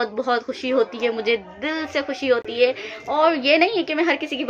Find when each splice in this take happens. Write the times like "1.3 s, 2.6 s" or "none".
none